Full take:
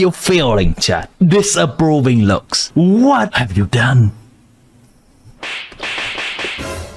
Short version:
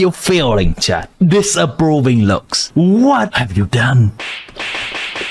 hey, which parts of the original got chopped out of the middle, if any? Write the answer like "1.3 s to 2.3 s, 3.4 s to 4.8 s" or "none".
4.2 s to 5.4 s